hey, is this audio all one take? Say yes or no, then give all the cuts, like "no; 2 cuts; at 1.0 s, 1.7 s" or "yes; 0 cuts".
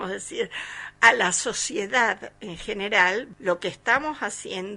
no; 1 cut; at 3.3 s